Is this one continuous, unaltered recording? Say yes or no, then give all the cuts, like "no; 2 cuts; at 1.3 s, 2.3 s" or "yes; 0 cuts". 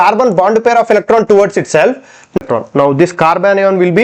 no; 1 cut; at 2.4 s